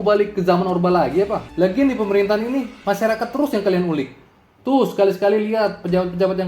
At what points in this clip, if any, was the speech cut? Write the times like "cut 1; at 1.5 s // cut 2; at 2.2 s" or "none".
cut 1; at 1.4 s